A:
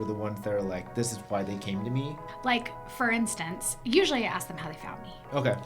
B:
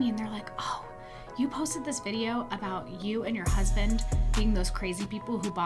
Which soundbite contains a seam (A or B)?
A